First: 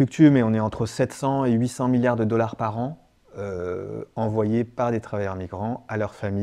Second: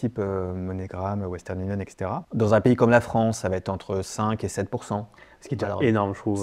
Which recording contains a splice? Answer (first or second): second